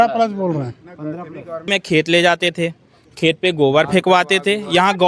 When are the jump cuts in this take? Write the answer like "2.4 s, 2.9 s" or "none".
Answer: 1.7 s

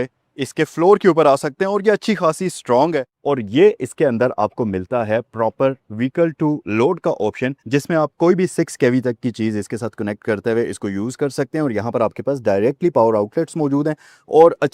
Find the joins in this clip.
3.1 s

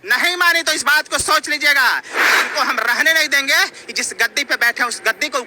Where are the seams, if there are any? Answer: 2.1 s

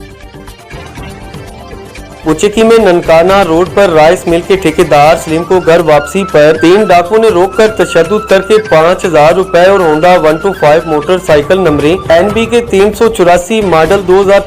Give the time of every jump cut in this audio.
2.2 s

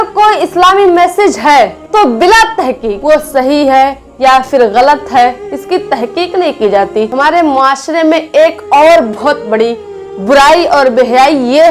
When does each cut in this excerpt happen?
1.8 s, 2.9 s, 7.1 s

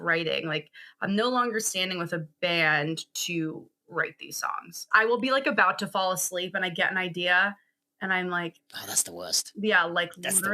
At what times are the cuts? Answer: 4.8 s

